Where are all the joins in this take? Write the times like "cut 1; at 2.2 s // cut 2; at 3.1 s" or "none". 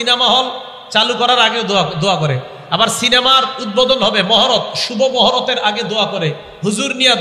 none